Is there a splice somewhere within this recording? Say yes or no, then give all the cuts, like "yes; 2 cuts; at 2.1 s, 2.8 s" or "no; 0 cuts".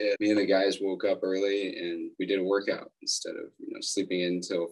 no; 0 cuts